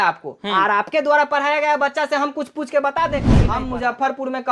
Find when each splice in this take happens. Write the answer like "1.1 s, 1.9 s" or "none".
3.4 s